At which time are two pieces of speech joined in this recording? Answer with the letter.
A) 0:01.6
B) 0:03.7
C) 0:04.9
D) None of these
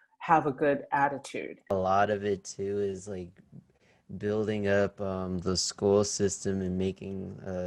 A